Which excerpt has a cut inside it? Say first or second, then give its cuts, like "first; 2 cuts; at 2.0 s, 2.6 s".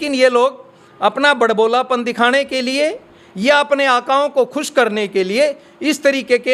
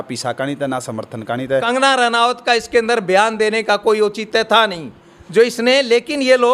second; 1 cut; at 1.7 s